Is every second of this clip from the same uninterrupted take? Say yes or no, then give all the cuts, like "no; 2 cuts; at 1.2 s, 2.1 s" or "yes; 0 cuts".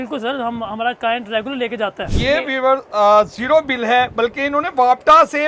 no; 1 cut; at 2.1 s